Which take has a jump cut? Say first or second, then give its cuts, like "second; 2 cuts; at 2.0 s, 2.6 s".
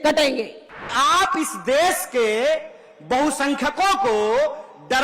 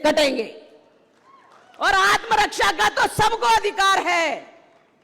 first; 1 cut; at 0.9 s